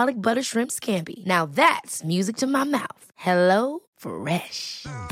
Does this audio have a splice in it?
no; 0 cuts

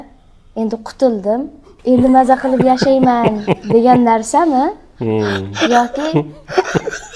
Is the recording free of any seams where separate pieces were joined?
yes; 0 cuts

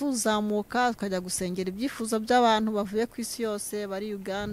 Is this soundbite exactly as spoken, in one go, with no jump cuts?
yes; 0 cuts

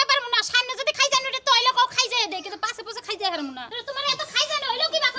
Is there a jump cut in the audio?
no; 0 cuts

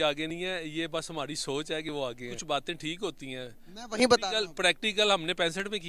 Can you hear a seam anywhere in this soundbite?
yes; 1 cut; at 2.4 s

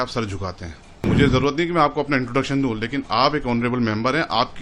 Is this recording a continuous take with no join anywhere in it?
no; 1 cut; at 1.1 s

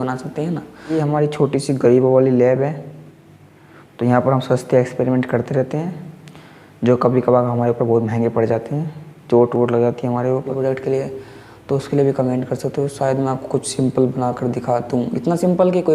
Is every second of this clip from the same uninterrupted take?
no; 2 cuts; at 1.0 s, 10.5 s

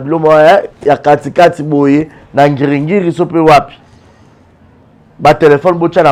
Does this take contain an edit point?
no; 0 cuts

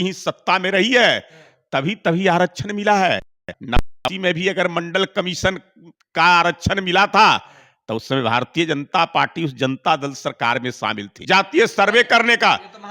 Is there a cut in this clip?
yes; 1 cut; at 11.1 s

